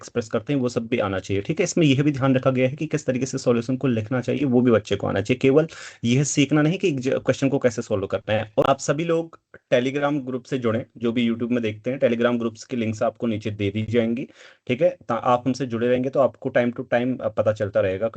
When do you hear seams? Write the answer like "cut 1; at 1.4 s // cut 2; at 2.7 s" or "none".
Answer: cut 1; at 8.7 s